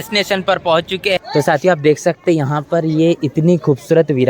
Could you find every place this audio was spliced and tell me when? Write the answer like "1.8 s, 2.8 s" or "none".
1.2 s